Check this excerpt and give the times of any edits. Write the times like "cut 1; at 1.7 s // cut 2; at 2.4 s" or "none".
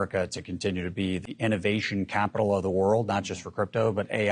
cut 1; at 1.2 s